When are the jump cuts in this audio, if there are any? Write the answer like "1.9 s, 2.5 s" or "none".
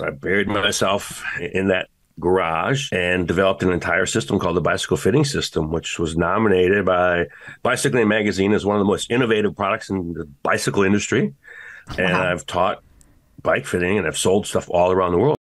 1.4 s, 2.8 s